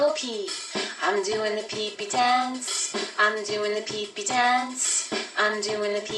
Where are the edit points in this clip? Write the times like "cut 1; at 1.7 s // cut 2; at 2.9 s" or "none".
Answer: none